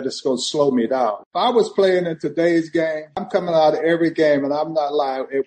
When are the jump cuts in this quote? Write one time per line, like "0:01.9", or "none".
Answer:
0:01.2
0:03.2

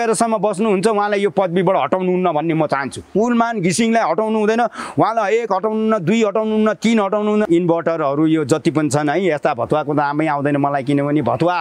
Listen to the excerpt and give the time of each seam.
0:03.1
0:07.5

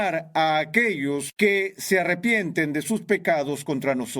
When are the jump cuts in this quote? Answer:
0:01.3

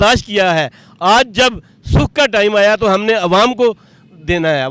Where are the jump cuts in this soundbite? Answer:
none

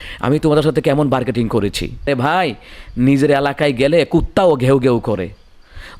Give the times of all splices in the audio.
0:02.0

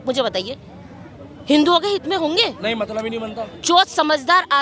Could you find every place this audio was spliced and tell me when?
0:03.5

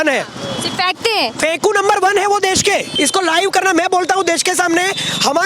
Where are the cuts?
0:02.9

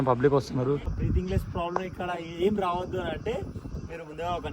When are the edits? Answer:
0:00.9

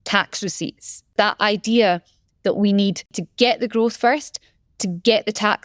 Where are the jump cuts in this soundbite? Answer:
0:01.1
0:03.2

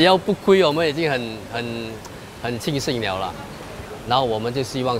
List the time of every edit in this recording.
0:03.6

